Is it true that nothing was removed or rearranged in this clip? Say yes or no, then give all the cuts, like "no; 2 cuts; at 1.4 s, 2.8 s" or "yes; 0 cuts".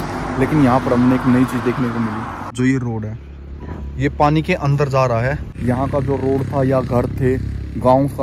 no; 2 cuts; at 2.4 s, 5.5 s